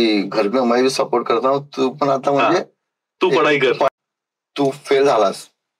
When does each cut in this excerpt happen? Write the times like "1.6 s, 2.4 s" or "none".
3.9 s